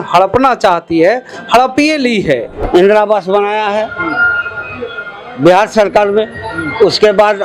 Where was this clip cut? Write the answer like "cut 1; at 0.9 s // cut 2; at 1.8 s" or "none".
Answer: cut 1; at 2.5 s

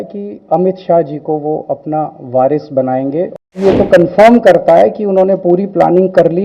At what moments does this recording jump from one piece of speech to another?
cut 1; at 3.5 s

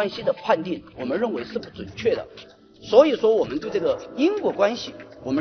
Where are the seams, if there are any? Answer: none

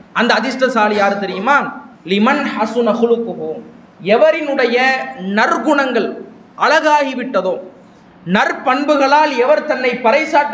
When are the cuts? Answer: none

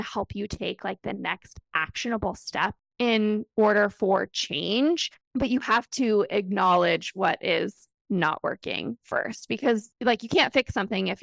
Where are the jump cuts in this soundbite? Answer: cut 1; at 9.9 s

